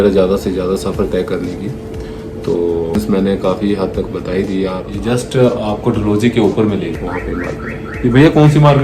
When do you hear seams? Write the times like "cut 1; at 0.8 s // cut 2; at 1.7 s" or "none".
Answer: cut 1; at 3.0 s // cut 2; at 4.9 s // cut 3; at 7.0 s